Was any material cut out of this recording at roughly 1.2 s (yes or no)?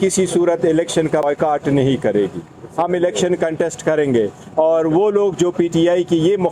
yes